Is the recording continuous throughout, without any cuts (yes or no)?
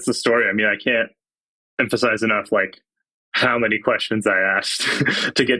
yes